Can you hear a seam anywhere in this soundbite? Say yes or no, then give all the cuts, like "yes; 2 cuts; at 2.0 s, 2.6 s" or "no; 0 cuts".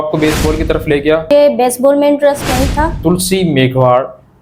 yes; 2 cuts; at 1.3 s, 2.9 s